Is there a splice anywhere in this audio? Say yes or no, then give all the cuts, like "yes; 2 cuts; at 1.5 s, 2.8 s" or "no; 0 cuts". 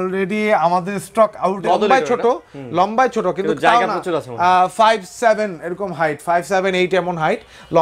yes; 1 cut; at 1.6 s